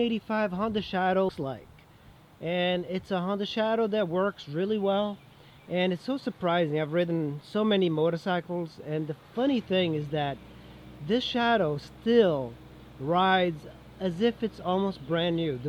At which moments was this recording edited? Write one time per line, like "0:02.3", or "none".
0:01.3